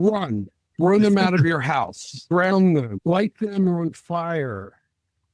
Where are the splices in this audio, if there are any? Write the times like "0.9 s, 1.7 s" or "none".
2.2 s, 2.9 s